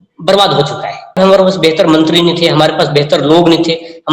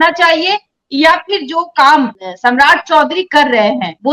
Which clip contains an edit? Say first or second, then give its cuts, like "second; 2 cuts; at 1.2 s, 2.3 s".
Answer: first; 1 cut; at 1.1 s